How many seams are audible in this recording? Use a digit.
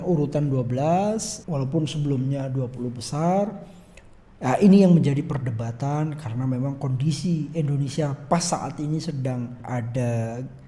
2